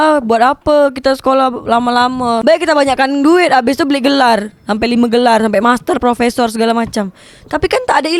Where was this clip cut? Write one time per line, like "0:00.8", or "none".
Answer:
none